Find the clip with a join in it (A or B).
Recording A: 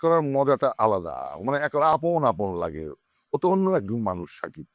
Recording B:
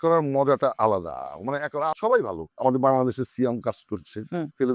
B